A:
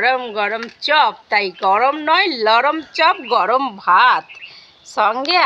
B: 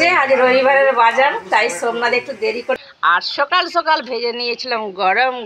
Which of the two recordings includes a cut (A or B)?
B